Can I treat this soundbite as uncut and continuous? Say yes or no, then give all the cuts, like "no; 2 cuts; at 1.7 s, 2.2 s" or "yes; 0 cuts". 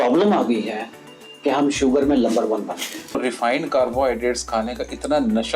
no; 1 cut; at 3.2 s